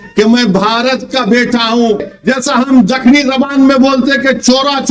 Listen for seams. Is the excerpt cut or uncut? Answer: cut